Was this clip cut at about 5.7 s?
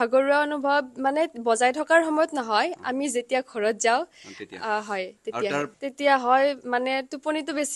yes; 1 cut; at 5.7 s

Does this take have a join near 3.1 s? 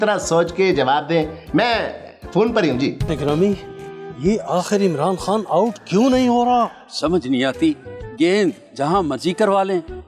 yes; 1 cut; at 3.1 s

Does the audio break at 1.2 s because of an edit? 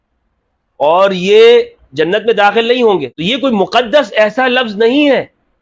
no; 1 cut; at 3.2 s

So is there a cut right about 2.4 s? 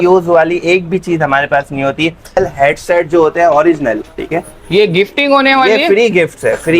yes; 1 cut; at 2.4 s

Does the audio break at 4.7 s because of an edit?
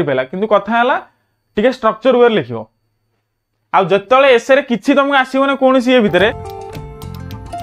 no; 1 cut; at 6.4 s

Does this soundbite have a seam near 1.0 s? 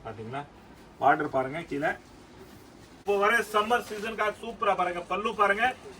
no; 1 cut; at 3.0 s

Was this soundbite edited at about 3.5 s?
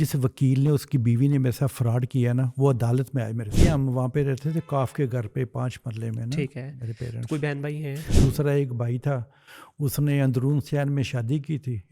yes; 2 cuts; at 3.5 s, 8.1 s

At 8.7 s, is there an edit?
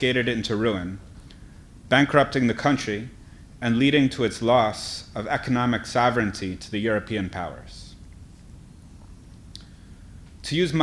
no; 0 cuts

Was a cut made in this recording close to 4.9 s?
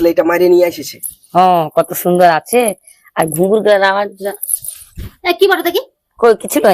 no; 1 cut; at 1.5 s

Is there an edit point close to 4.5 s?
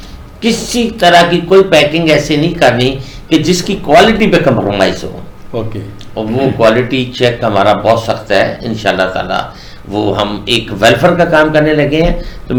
no; 0 cuts

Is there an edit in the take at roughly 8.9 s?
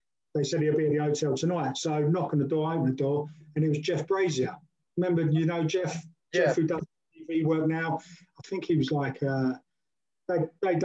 no; 0 cuts

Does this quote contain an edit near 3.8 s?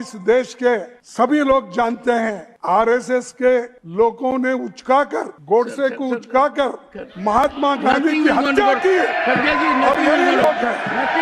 yes; 4 cuts; at 1.0 s, 2.5 s, 3.8 s, 5.3 s

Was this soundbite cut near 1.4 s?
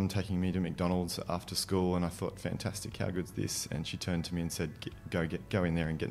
no; 0 cuts

